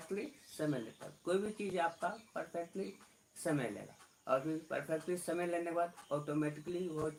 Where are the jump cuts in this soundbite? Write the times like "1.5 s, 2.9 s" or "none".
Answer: none